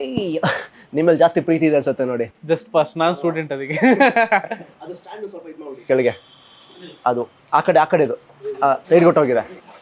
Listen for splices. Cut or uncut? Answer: cut